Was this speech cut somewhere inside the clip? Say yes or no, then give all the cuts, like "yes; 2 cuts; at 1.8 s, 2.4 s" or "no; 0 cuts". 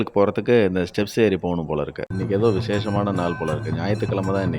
yes; 1 cut; at 2.0 s